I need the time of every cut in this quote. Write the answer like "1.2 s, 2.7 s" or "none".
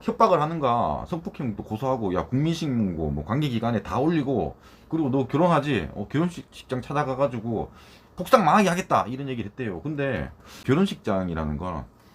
10.6 s